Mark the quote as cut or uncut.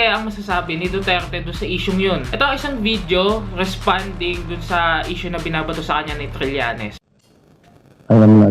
cut